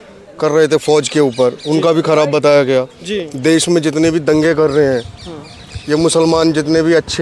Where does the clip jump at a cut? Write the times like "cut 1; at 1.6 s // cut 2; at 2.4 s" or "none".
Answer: none